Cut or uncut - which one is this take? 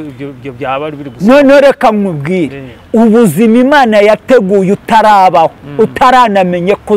uncut